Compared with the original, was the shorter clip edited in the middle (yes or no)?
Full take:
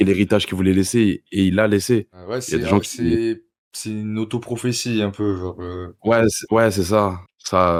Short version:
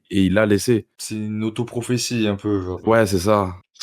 yes